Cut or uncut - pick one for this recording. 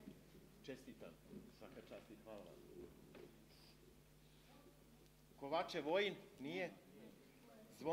uncut